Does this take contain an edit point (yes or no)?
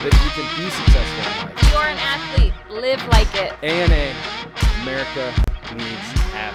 no